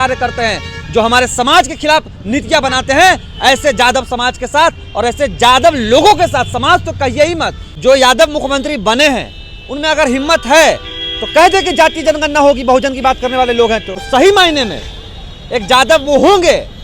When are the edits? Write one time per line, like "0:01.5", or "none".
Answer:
0:07.6
0:14.0